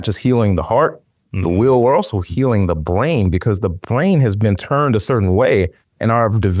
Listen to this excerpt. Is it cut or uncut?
uncut